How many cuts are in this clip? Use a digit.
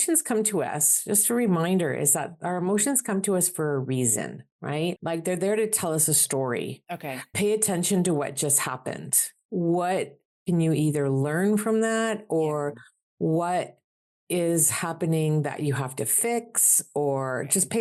0